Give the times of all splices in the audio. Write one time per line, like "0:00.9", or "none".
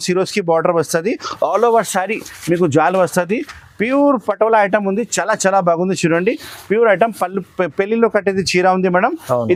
none